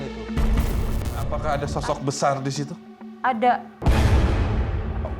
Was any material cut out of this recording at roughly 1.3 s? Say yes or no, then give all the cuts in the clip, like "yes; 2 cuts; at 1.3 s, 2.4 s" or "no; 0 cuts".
yes; 1 cut; at 1.3 s